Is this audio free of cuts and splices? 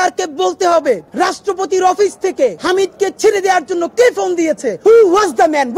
no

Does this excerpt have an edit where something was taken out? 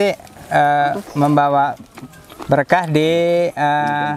no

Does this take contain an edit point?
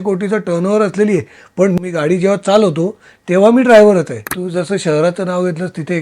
yes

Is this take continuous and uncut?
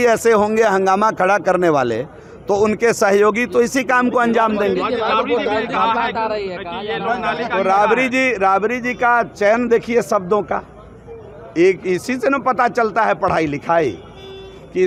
yes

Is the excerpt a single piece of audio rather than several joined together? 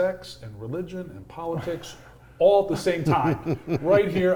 yes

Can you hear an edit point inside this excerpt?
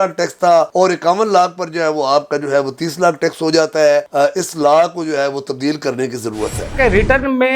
yes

